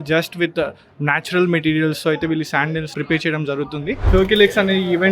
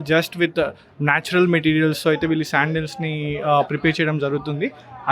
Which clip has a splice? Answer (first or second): first